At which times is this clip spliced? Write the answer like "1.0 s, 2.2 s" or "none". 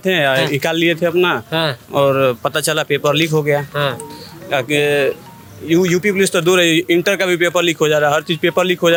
none

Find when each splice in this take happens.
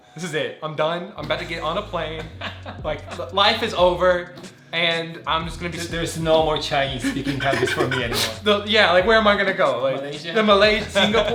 none

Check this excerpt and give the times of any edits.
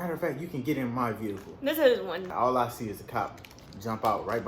2.3 s

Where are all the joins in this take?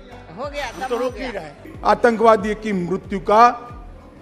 1.6 s

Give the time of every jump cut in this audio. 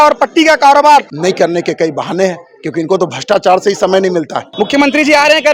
1.1 s, 4.4 s

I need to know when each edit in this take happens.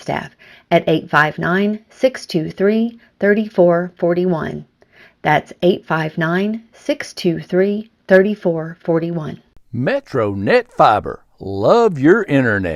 9.5 s

